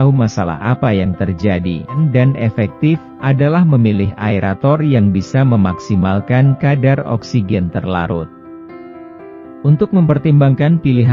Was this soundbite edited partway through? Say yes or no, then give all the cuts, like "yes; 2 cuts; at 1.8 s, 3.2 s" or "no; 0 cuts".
yes; 1 cut; at 2.0 s